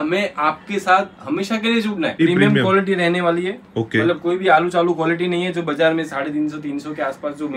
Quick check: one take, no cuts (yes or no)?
no